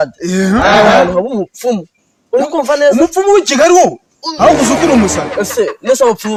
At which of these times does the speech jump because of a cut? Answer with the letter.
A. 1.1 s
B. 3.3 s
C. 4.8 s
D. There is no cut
D